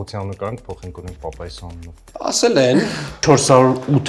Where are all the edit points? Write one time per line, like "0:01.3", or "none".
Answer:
0:02.0
0:03.2